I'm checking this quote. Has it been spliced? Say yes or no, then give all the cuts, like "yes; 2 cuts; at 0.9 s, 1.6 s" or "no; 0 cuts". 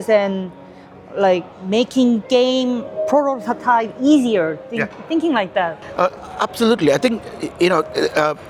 no; 0 cuts